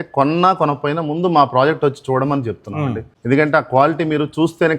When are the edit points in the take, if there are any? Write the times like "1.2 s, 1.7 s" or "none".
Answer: 3.1 s